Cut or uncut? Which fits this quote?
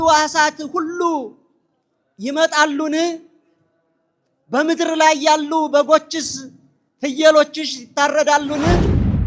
uncut